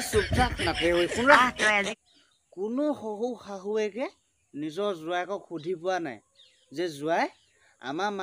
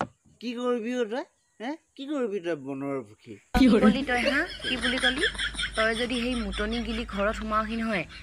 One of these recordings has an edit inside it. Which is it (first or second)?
first